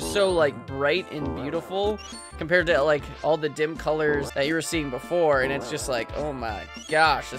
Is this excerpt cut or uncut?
cut